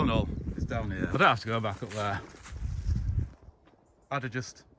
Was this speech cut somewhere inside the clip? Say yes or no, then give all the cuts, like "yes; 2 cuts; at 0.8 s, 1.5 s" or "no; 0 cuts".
yes; 1 cut; at 1.2 s